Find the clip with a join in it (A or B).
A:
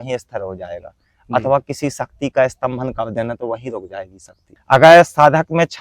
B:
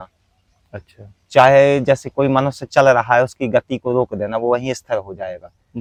A